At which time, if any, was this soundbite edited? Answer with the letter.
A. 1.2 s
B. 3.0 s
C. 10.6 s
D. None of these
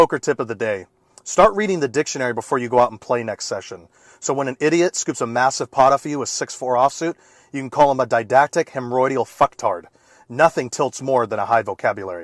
D